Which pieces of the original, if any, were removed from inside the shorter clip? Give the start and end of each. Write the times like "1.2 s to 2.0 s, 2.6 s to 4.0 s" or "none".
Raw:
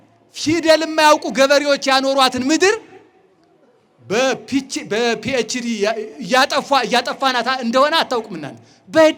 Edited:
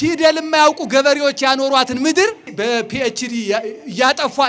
2.9 s to 4.8 s